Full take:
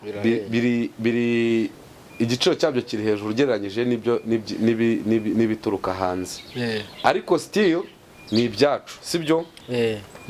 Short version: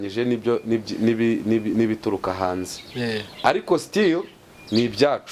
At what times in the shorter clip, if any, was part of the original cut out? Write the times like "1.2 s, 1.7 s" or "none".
none